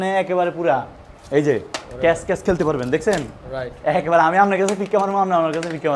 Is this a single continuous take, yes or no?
yes